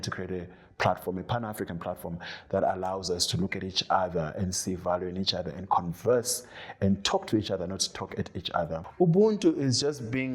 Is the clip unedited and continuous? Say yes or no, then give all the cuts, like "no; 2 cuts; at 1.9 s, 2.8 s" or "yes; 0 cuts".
no; 1 cut; at 8.8 s